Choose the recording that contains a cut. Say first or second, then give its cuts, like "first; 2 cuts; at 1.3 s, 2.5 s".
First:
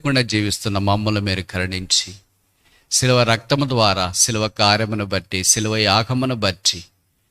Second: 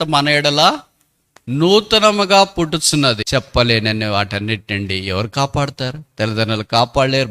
second; 1 cut; at 3.2 s